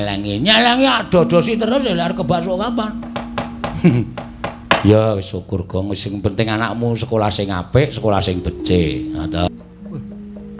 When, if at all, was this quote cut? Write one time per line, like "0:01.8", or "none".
0:09.5